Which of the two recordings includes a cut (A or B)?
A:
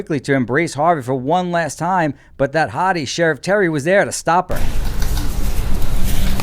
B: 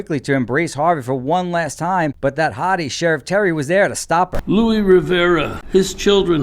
B